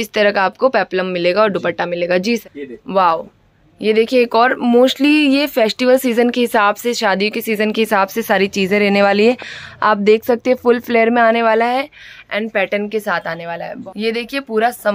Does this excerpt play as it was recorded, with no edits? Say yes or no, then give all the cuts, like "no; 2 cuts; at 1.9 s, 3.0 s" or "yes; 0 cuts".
no; 2 cuts; at 2.4 s, 13.7 s